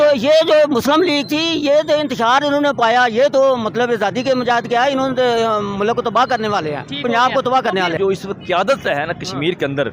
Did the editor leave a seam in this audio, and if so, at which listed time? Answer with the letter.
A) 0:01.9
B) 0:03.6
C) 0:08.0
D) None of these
C